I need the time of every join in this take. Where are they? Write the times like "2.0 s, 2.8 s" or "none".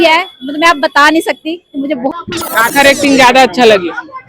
2.1 s